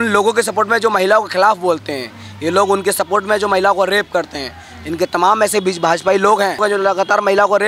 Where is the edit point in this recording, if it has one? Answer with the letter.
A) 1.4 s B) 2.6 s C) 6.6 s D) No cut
C